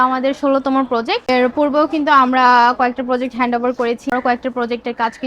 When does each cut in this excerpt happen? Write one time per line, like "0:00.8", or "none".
0:01.2
0:04.1